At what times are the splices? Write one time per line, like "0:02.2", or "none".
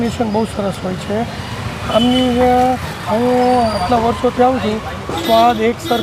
none